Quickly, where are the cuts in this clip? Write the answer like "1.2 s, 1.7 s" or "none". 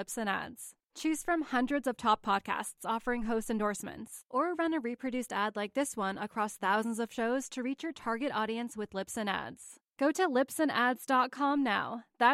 none